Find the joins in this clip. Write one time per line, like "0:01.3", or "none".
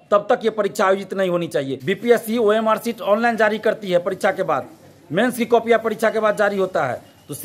0:01.8